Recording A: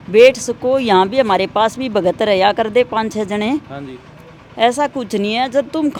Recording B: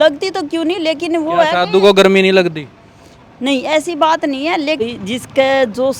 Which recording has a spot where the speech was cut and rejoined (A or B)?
B